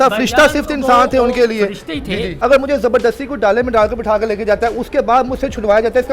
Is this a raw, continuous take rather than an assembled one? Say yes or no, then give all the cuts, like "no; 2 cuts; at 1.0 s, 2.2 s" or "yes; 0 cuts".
no; 1 cut; at 2.3 s